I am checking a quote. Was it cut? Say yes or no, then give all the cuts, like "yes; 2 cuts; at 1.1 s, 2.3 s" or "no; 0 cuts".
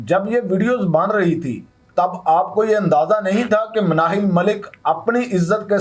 no; 0 cuts